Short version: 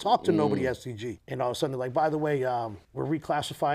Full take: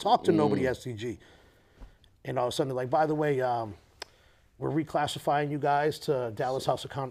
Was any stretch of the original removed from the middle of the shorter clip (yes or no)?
yes